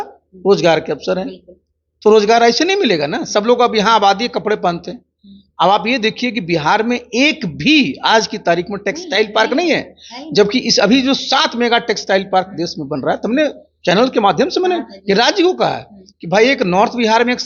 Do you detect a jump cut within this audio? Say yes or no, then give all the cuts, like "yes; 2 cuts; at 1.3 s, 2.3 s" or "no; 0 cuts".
no; 0 cuts